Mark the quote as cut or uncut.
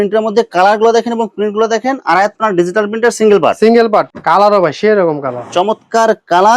cut